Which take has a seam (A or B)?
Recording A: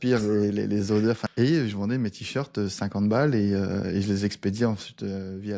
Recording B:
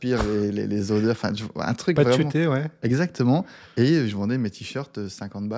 A